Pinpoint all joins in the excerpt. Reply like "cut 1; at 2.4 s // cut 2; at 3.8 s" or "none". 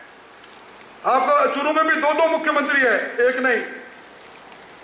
none

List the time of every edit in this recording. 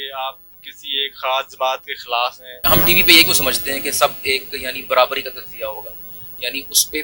cut 1; at 2.6 s

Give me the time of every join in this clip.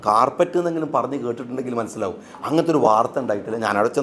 none

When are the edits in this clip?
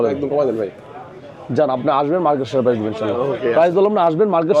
none

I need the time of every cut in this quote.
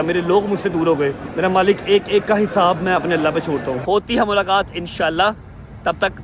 cut 1; at 1.2 s // cut 2; at 3.8 s

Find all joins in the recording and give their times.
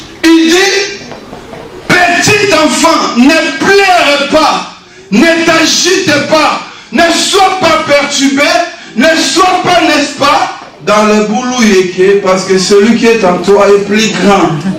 none

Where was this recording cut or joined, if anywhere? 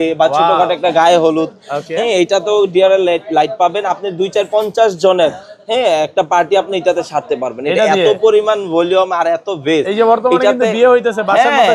none

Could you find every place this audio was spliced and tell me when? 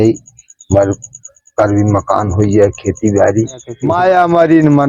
cut 1; at 3.8 s

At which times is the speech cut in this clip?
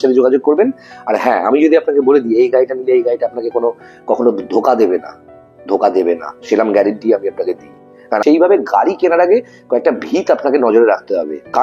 cut 1; at 8.2 s

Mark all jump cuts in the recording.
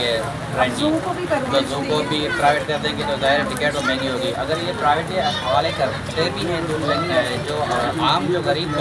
none

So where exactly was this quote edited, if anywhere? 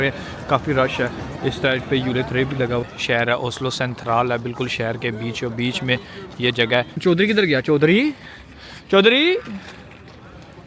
cut 1; at 2.9 s // cut 2; at 7.0 s

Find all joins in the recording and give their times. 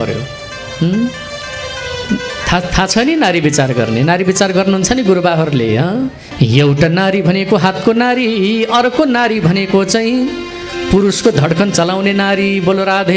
cut 1; at 6.2 s

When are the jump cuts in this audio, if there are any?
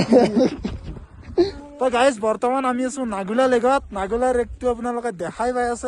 cut 1; at 1.5 s

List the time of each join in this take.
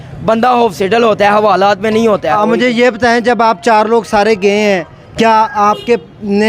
cut 1; at 2.3 s

